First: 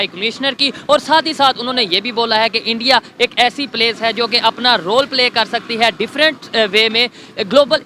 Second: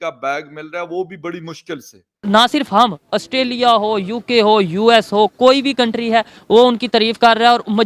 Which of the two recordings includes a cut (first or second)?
second